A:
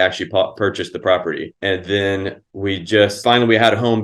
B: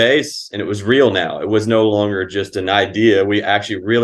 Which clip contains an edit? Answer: A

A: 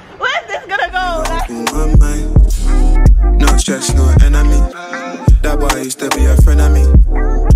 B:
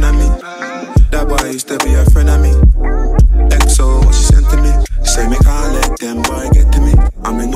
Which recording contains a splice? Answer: A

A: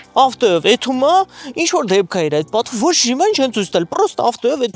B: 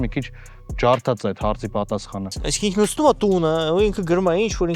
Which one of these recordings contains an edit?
B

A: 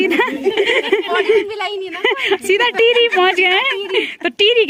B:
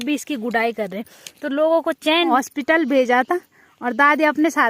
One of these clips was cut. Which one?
B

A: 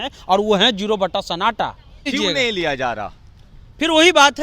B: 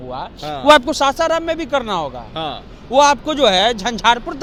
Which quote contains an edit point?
A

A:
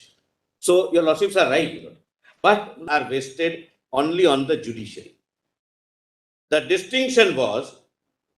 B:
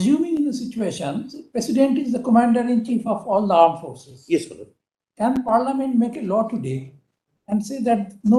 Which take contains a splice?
A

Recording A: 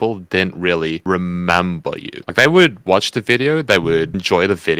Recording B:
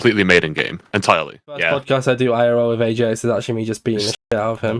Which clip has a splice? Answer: B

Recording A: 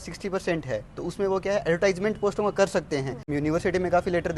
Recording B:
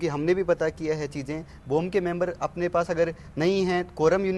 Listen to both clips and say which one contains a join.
A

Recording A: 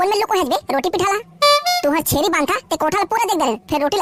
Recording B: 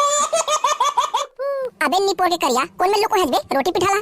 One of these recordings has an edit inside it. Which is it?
B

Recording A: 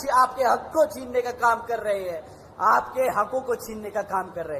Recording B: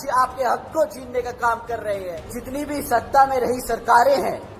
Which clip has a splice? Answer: B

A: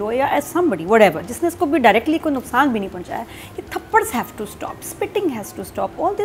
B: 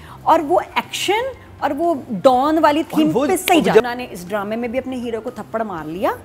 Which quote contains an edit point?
B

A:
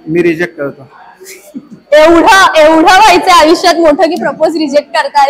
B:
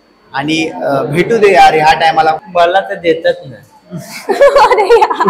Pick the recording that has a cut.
B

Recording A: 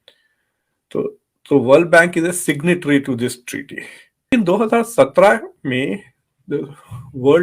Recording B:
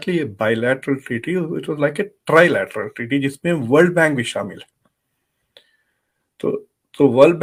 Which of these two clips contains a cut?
A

